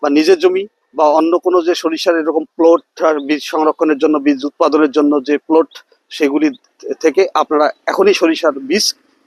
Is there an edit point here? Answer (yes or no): no